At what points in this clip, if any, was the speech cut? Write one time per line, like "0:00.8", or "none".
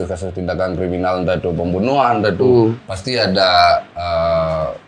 0:02.9

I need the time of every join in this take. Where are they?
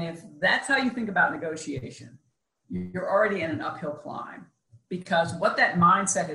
none

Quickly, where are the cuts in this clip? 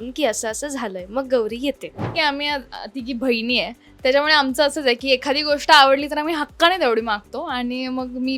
0:02.1

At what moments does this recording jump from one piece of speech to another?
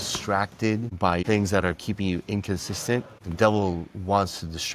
0:00.9
0:03.2

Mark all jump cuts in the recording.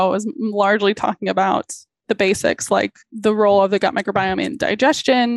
0:02.0
0:03.0

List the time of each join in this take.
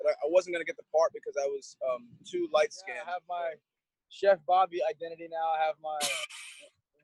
0:03.1

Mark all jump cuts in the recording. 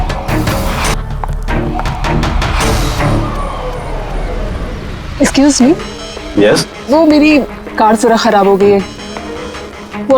0:00.9

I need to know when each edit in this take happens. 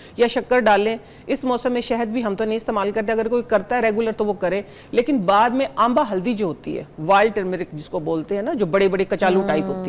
none

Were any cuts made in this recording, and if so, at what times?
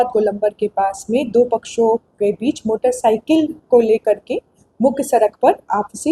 none

